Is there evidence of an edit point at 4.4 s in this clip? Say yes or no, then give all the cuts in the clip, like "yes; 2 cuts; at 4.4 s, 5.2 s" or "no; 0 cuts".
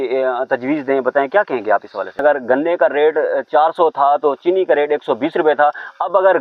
no; 1 cut; at 2.1 s